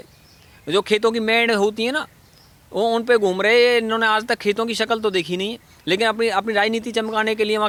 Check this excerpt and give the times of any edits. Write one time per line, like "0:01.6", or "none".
none